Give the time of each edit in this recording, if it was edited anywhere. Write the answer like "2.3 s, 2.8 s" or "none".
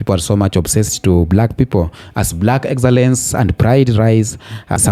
none